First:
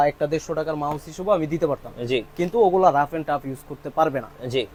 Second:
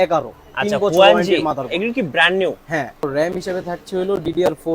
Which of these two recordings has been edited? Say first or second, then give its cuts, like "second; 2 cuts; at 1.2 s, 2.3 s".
second; 1 cut; at 3.0 s